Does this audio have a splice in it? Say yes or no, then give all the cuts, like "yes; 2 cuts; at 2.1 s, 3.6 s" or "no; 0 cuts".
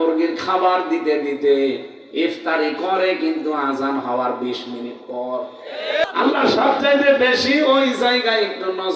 yes; 1 cut; at 6.0 s